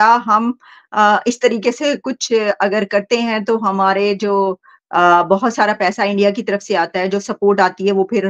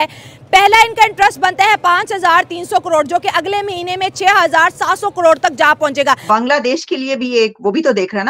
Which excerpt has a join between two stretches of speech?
second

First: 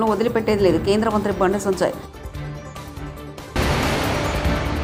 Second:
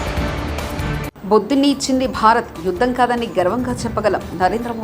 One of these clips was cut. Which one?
second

